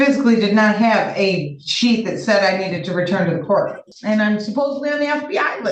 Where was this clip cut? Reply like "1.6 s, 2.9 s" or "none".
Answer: 3.9 s